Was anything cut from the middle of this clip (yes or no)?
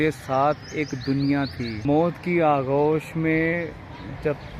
yes